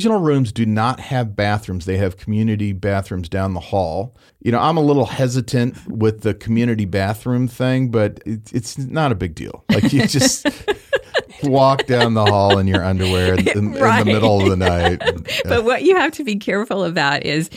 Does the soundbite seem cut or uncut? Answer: cut